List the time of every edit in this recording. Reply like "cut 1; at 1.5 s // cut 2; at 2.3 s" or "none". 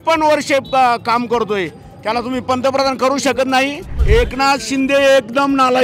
cut 1; at 3.9 s

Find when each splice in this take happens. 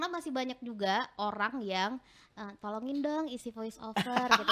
none

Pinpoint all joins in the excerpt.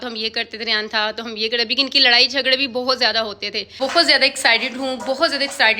cut 1; at 3.8 s

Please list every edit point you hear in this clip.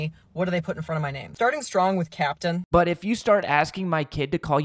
cut 1; at 1.2 s // cut 2; at 2.6 s

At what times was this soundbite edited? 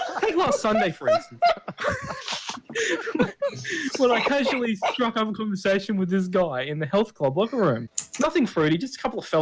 cut 1; at 8.0 s

